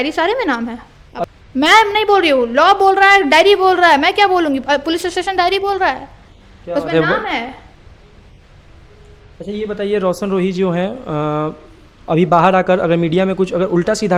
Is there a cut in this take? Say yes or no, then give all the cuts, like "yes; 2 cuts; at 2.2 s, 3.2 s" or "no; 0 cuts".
no; 0 cuts